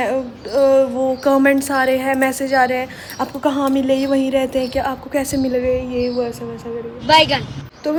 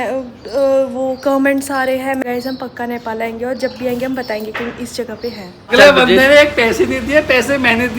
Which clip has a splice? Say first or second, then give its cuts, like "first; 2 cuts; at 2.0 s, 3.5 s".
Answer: second; 2 cuts; at 2.2 s, 5.8 s